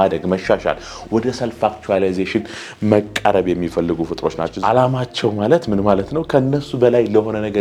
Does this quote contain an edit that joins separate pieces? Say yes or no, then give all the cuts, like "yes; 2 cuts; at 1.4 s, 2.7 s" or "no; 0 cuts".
yes; 1 cut; at 4.5 s